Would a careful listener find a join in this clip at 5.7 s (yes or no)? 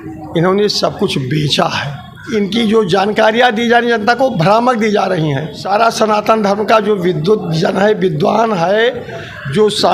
yes